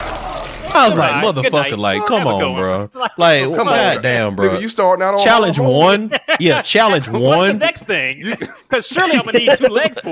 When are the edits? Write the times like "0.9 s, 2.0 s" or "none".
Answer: none